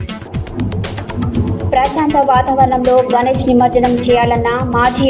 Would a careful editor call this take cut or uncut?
uncut